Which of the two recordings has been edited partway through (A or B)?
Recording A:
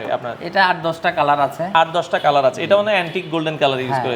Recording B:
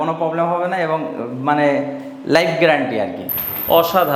B